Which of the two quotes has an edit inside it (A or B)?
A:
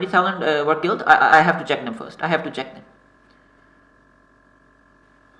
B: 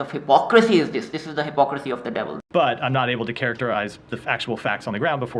B